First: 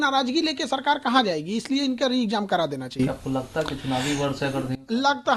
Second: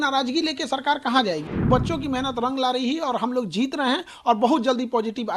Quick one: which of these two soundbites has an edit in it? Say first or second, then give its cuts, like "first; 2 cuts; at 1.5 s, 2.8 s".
second; 1 cut; at 1.7 s